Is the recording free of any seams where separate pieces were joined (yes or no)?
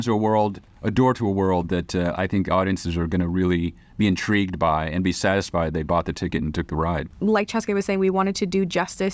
no